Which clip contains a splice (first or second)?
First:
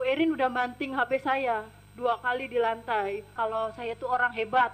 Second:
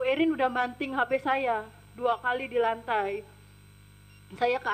first